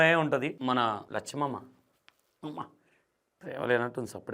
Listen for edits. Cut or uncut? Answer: cut